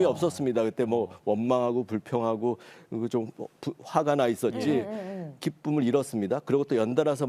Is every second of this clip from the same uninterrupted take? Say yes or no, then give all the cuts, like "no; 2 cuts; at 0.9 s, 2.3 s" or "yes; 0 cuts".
yes; 0 cuts